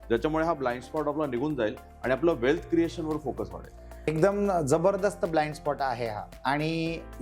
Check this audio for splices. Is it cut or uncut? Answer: cut